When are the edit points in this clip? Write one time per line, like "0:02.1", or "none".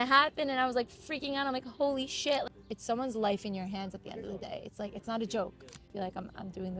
0:02.4
0:05.9